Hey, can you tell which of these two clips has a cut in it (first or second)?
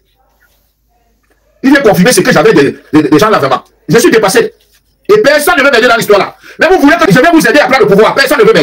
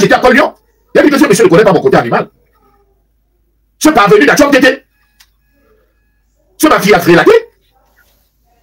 first